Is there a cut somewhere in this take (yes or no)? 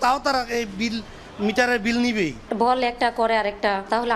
yes